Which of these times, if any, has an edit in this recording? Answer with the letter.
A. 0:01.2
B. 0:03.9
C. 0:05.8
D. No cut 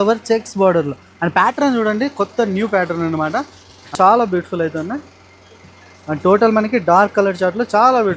B